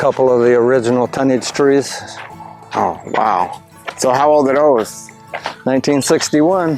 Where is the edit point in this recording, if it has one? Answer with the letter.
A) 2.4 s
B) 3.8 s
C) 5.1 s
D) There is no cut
D